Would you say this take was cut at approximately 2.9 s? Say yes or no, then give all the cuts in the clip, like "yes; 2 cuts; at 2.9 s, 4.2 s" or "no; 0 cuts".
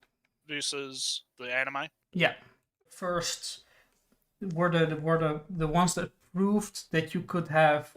yes; 1 cut; at 2.9 s